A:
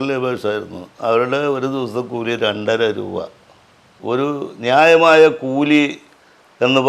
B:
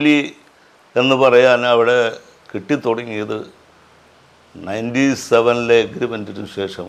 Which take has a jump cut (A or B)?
A